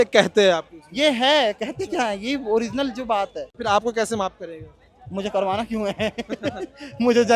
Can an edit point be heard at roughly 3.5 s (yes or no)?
yes